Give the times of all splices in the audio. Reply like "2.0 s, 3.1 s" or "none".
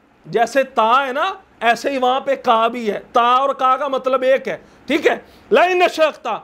none